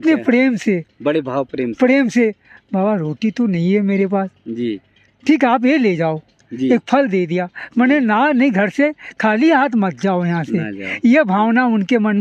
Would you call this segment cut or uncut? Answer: uncut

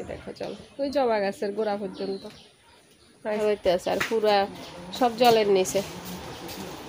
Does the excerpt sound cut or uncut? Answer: cut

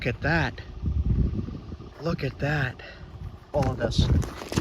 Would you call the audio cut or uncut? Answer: cut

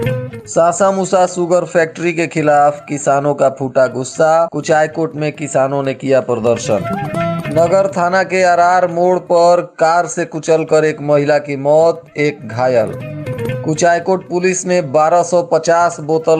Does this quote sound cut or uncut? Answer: cut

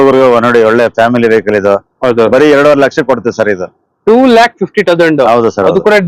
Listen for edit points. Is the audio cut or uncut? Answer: uncut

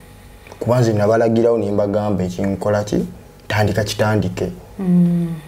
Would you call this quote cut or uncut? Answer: uncut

